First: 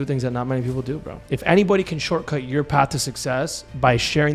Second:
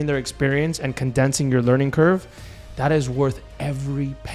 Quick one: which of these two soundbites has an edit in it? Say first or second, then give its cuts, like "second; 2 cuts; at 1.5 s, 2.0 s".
first; 1 cut; at 1.2 s